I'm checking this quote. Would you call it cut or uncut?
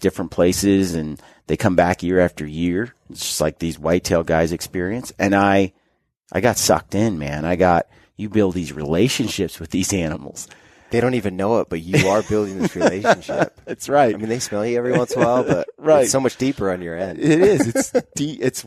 uncut